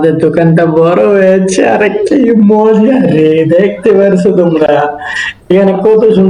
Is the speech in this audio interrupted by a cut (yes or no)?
no